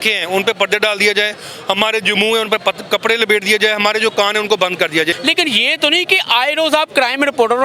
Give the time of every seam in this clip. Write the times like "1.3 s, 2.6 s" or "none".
5.1 s